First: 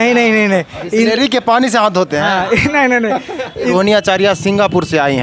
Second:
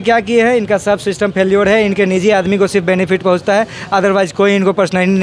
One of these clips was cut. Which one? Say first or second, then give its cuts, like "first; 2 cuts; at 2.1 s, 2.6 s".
first; 1 cut; at 3.7 s